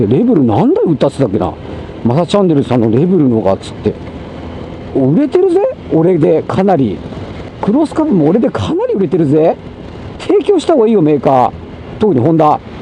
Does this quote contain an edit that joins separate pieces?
no; 0 cuts

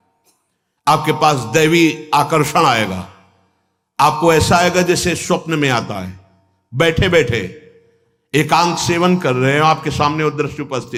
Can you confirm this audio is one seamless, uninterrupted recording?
yes; 0 cuts

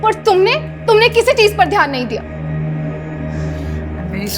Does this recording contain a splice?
no; 0 cuts

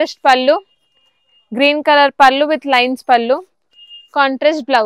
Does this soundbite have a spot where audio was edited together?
no; 0 cuts

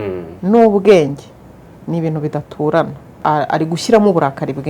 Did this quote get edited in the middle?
yes; 1 cut; at 3.2 s

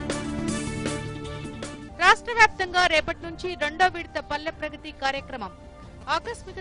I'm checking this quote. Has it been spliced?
yes; 1 cut; at 1.8 s

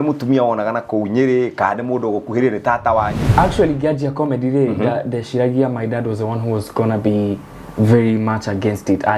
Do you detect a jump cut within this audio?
yes; 1 cut; at 3.2 s

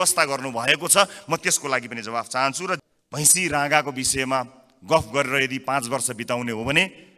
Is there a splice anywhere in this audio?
yes; 1 cut; at 2.8 s

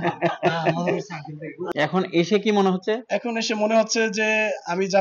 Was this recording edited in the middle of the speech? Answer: yes; 1 cut; at 1.6 s

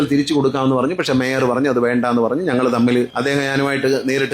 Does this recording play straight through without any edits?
no; 1 cut; at 3.1 s

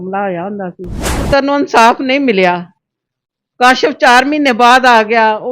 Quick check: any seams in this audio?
yes; 1 cut; at 1.2 s

